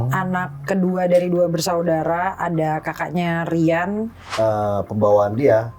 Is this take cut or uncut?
cut